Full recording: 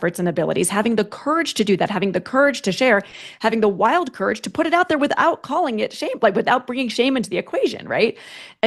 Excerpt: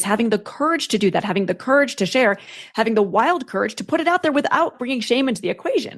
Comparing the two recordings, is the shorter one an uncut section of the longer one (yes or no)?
no